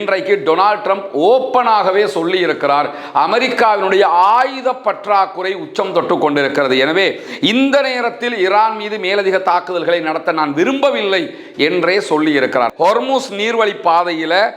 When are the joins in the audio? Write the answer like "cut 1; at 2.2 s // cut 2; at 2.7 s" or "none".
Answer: cut 1; at 12.7 s